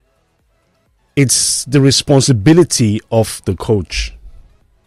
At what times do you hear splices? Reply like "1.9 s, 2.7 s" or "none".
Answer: none